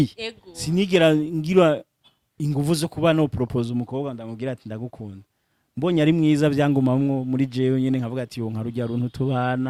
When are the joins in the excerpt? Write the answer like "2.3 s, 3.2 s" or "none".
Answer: none